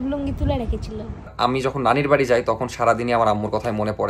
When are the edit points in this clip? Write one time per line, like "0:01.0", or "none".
0:01.3